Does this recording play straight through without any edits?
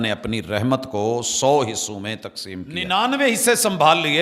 no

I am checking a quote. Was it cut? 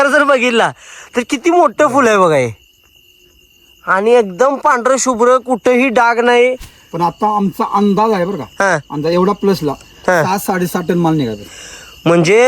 yes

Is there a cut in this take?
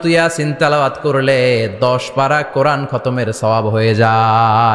no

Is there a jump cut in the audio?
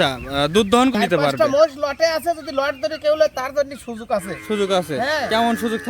yes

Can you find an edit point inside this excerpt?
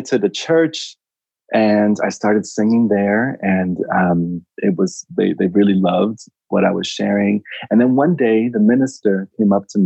no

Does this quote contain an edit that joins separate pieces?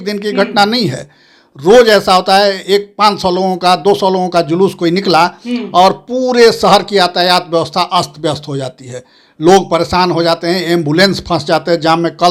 no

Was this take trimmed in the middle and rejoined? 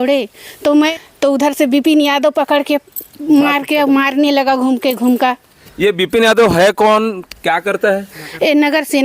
yes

